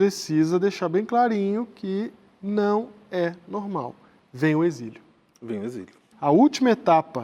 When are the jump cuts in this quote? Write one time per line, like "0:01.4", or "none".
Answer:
0:06.0